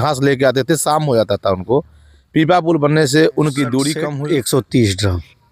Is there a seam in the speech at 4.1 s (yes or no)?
yes